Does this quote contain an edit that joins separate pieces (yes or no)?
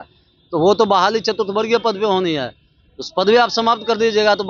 no